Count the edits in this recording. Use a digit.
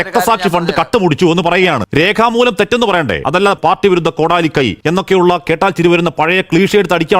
2